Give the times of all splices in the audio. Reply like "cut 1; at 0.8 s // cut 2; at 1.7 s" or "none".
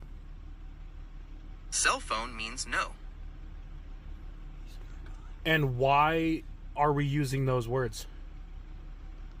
none